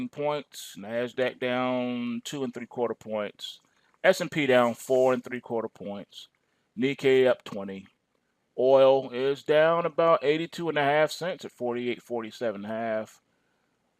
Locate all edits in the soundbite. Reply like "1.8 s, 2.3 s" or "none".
8.8 s

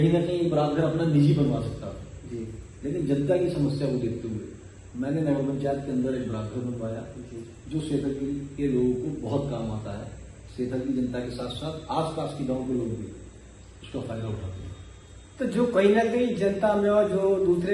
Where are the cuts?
none

